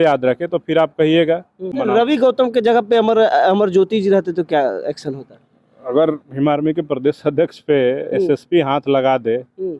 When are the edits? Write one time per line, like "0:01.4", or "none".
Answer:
0:01.7